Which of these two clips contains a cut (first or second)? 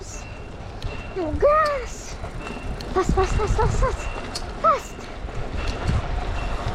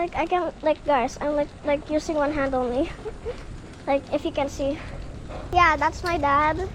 second